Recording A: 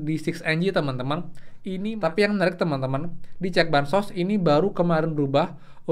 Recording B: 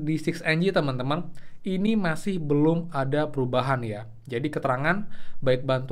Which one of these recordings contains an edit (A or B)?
A